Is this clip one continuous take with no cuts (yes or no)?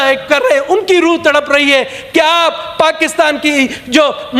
yes